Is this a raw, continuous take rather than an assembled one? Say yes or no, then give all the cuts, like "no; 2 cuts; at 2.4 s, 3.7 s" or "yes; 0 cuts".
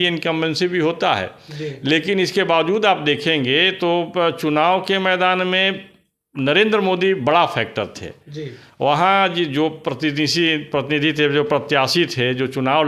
yes; 0 cuts